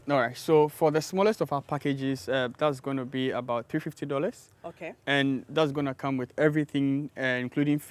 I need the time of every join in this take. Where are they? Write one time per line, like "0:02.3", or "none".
none